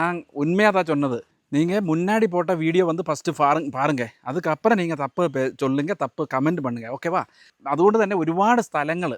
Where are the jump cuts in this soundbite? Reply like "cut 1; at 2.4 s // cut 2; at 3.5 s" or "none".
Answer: cut 1; at 1.5 s // cut 2; at 7.6 s